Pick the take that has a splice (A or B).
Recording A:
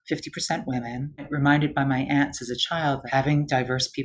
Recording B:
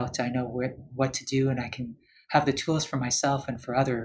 A